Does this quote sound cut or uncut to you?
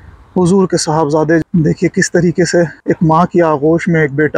cut